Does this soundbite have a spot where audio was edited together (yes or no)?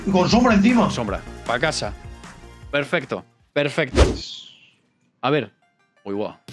no